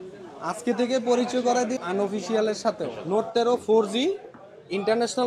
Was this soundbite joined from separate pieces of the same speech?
yes; 2 cuts; at 1.8 s, 3.0 s

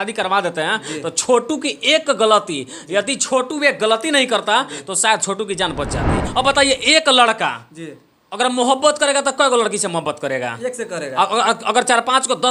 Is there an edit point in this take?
yes; 1 cut; at 6.2 s

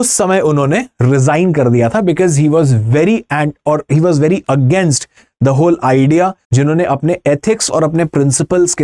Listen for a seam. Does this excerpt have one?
yes; 1 cut; at 6.4 s

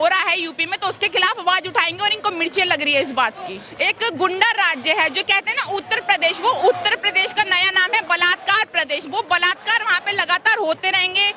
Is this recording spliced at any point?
yes; 1 cut; at 3.7 s

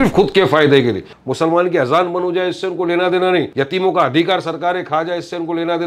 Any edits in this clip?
yes; 2 cuts; at 1.1 s, 3.5 s

